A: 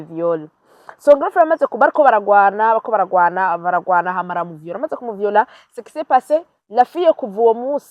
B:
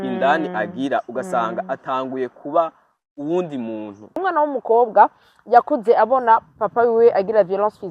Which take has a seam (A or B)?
B